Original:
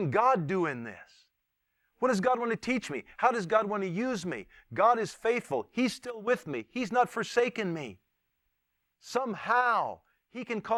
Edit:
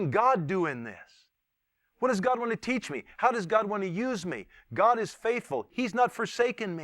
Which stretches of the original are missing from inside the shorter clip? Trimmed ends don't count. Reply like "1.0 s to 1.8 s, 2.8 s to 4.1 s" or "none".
5.7 s to 6.7 s